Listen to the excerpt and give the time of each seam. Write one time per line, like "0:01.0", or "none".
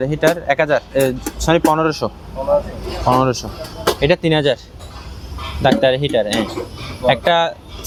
none